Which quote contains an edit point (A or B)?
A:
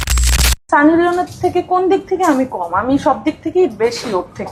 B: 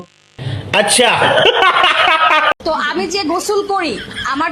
B